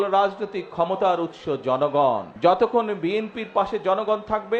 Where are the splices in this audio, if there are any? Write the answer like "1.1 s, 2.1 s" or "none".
2.3 s